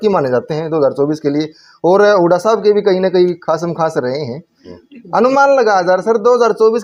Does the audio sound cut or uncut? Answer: uncut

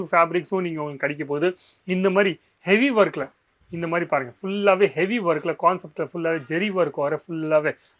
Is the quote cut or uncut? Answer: uncut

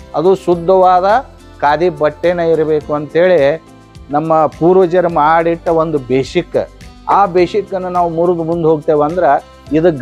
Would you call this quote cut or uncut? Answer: uncut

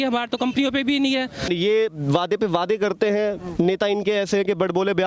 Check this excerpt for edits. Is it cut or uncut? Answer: cut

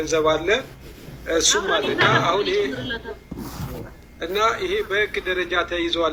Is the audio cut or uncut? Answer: uncut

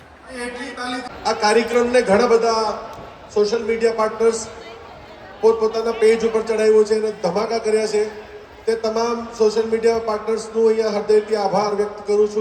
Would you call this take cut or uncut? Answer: cut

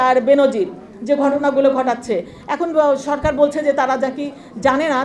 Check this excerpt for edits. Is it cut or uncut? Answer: uncut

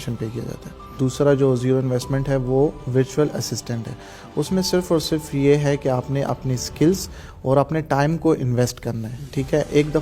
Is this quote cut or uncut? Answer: cut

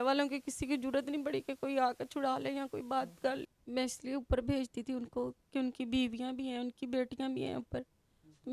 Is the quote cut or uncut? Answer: cut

